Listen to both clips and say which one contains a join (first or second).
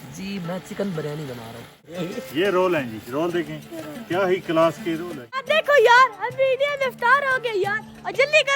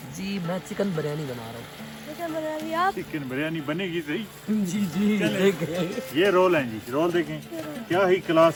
first